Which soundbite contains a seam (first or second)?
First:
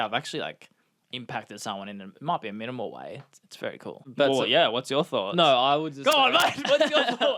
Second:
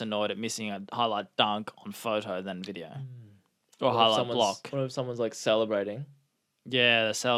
first